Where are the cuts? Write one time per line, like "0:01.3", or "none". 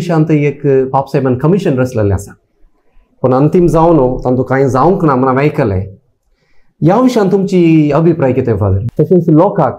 0:08.8